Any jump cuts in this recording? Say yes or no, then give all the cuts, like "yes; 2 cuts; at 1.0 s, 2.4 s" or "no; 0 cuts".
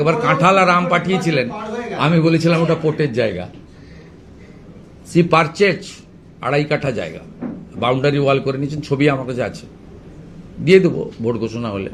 no; 0 cuts